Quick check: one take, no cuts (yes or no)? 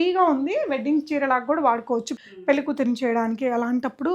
no